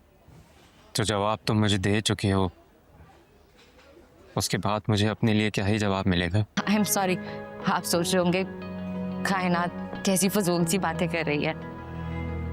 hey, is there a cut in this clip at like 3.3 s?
no; 1 cut; at 6.5 s

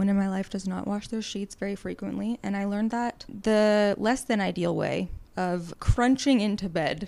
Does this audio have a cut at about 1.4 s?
no; 2 cuts; at 3.2 s, 5.4 s

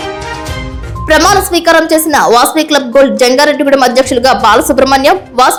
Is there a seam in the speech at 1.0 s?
no; 0 cuts

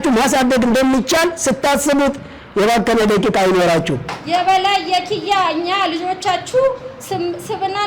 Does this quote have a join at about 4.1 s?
yes; 1 cut; at 4.1 s

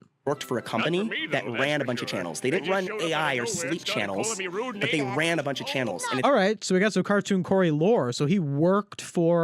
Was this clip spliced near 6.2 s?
yes; 1 cut; at 6.2 s

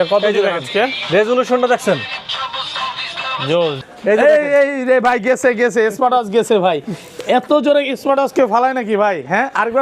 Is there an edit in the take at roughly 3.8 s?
yes; 1 cut; at 3.8 s

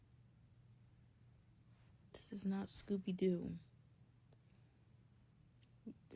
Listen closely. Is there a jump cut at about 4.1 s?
no; 0 cuts

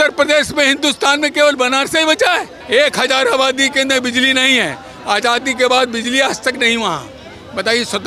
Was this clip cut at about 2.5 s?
yes; 1 cut; at 2.5 s

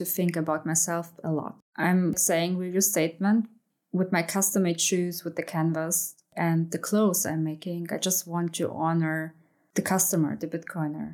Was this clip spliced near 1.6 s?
yes; 2 cuts; at 1.6 s, 3.6 s

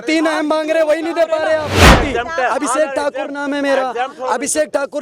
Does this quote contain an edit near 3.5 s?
no; 1 cut; at 1.8 s

